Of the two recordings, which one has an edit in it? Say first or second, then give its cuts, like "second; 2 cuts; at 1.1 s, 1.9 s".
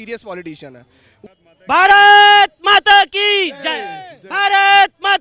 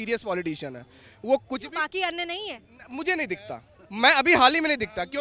first; 1 cut; at 1.1 s